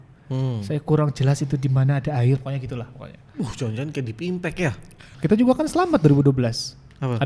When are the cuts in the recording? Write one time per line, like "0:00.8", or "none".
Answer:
0:05.0